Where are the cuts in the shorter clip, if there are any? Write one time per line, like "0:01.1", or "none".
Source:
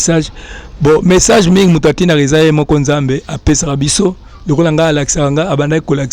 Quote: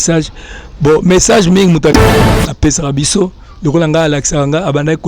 0:02.0